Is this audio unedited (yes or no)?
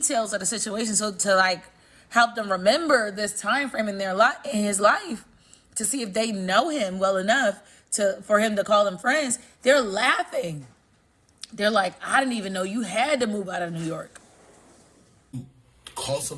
no